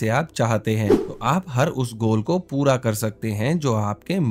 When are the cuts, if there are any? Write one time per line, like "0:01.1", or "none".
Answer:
0:01.1